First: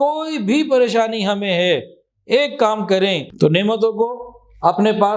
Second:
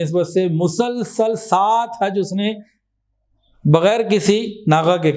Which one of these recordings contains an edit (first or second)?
first